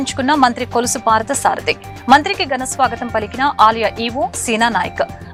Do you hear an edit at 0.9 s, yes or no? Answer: no